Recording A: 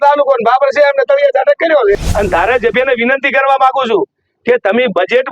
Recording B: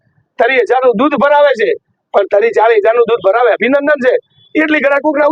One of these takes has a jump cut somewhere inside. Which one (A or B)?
A